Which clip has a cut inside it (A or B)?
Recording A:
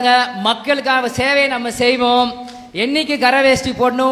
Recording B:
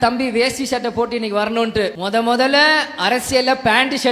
B